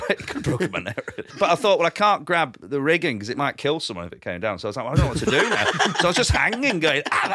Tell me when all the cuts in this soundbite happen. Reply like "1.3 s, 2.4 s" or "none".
1.3 s, 2.6 s, 3.6 s